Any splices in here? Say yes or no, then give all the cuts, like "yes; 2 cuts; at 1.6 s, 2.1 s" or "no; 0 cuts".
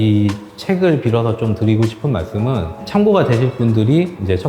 yes; 1 cut; at 2.8 s